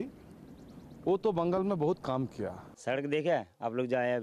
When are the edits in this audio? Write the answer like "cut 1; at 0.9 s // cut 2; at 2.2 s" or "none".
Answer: cut 1; at 2.7 s